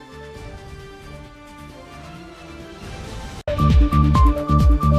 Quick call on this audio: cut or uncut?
cut